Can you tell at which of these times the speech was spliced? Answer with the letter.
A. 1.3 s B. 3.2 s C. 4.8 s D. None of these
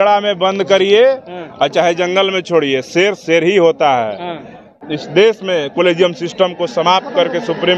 C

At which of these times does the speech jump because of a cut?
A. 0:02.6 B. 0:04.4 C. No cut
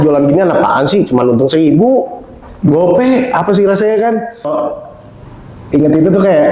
B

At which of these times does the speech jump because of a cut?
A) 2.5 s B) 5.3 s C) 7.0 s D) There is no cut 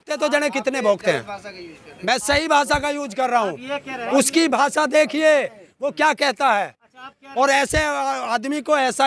D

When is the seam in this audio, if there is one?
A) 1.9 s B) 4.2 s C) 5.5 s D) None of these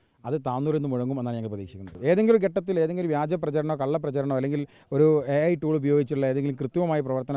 A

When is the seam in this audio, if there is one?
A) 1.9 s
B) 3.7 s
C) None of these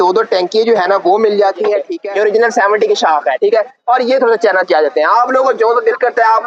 A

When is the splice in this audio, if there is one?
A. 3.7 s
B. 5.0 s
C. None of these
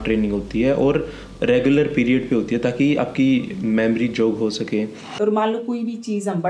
B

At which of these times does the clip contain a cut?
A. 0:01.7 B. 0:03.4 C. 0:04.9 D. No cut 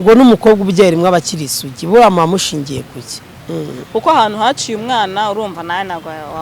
B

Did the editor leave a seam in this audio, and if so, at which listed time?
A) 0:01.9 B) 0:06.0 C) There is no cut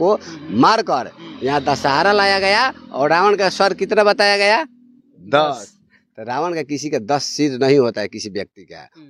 C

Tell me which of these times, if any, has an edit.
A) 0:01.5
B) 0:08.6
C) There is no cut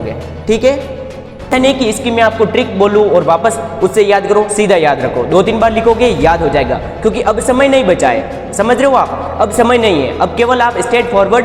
A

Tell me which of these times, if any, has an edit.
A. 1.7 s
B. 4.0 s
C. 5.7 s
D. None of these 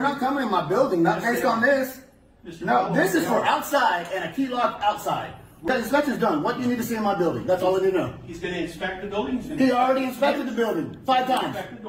C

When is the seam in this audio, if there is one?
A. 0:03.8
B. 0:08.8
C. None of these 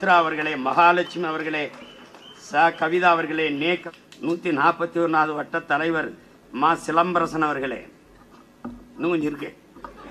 A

